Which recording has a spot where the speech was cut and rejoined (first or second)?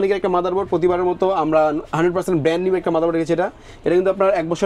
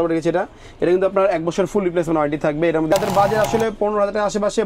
second